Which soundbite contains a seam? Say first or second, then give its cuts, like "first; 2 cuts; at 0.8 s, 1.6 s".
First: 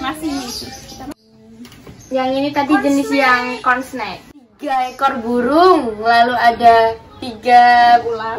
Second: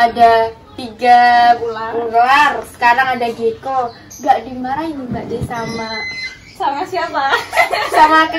first; 2 cuts; at 1.2 s, 4.5 s